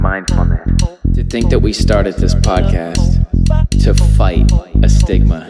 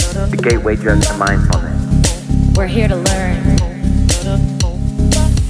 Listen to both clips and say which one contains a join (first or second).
first